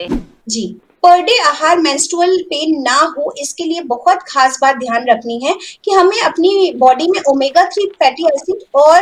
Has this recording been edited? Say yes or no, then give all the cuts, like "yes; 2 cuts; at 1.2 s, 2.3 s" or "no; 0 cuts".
no; 0 cuts